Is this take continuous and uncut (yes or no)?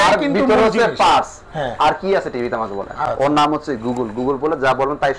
no